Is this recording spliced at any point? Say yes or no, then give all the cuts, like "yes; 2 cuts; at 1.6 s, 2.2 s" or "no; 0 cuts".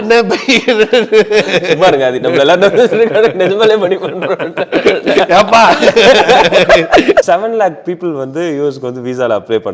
yes; 1 cut; at 7.2 s